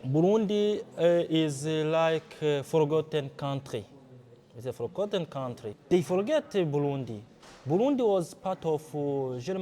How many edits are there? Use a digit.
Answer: 1